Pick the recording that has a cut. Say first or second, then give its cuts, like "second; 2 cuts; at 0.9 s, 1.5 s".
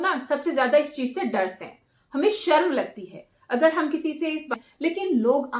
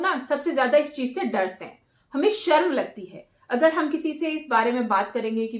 first; 1 cut; at 4.5 s